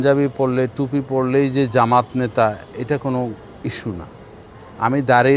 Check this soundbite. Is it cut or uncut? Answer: uncut